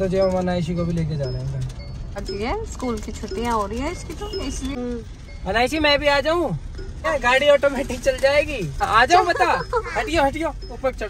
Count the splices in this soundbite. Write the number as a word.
four